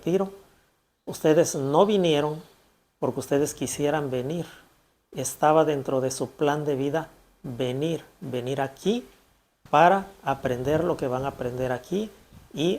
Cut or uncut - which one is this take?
uncut